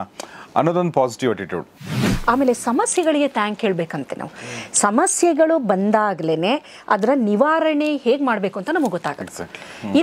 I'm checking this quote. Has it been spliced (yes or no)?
yes